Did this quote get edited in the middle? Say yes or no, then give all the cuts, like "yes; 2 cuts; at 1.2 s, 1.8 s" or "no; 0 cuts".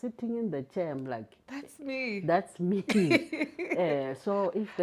no; 0 cuts